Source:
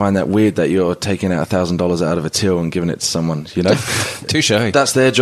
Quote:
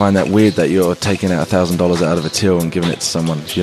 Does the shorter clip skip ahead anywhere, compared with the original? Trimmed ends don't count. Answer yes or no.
no